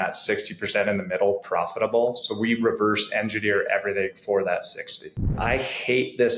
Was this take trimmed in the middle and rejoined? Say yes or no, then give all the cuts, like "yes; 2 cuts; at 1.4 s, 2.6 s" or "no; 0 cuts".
yes; 1 cut; at 5.3 s